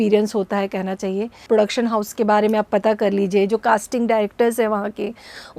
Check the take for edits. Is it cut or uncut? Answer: cut